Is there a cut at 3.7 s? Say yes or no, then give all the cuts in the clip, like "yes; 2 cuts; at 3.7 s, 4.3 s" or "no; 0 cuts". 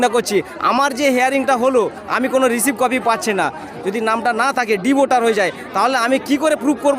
yes; 1 cut; at 3.7 s